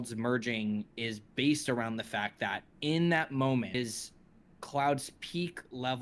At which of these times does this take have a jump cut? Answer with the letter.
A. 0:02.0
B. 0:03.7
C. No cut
B